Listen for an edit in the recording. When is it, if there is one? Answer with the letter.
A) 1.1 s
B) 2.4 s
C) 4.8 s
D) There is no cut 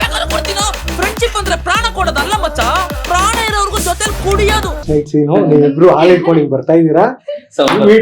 C